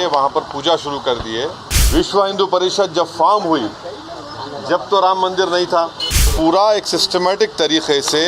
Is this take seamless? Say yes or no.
no